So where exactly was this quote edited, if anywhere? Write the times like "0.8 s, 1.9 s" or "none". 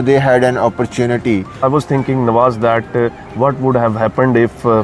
1.5 s